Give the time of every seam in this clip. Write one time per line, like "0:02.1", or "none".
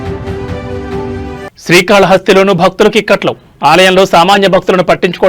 0:01.2

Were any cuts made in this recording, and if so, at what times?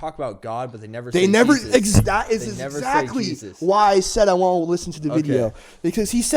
none

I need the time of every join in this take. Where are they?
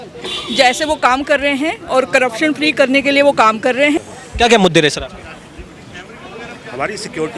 0:04.0

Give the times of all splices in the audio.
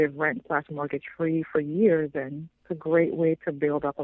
none

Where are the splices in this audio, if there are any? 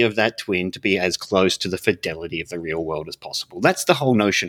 none

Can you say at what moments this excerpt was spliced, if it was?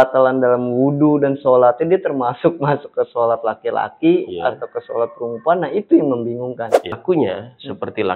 0:07.0

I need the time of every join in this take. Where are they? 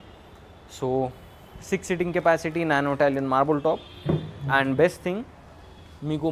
none

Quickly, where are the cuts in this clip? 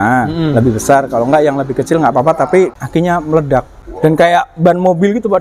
0:02.8
0:03.8

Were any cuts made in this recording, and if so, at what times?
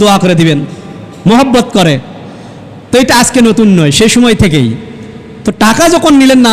none

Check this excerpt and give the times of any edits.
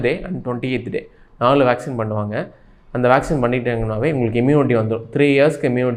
none

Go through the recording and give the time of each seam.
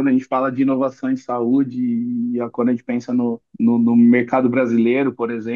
0:03.4

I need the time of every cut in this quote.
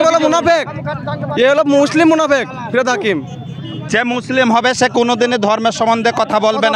none

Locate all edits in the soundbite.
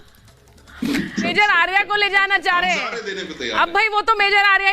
0:01.3

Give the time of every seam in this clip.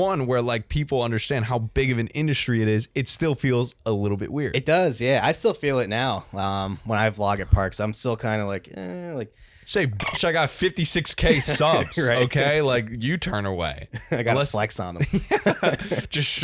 none

